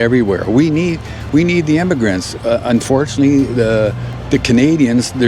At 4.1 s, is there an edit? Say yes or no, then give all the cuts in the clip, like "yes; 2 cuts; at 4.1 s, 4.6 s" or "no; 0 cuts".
yes; 1 cut; at 4.1 s